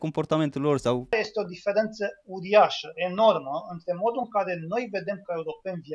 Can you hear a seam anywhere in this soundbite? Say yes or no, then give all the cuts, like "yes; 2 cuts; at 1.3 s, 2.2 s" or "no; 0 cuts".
yes; 1 cut; at 1.0 s